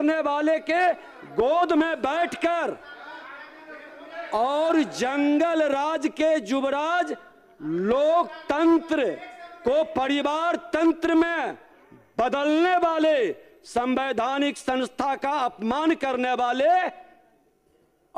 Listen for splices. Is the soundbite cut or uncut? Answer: uncut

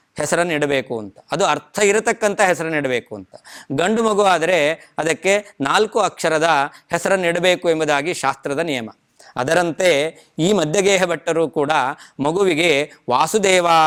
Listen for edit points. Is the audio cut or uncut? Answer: uncut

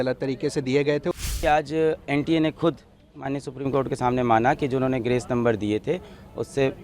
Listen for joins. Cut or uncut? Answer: cut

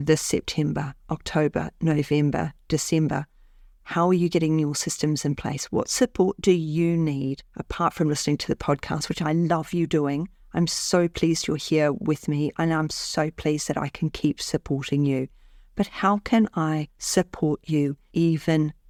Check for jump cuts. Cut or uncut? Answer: uncut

